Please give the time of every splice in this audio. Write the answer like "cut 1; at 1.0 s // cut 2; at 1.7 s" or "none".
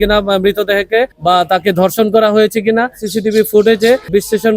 cut 1; at 1.1 s // cut 2; at 3.0 s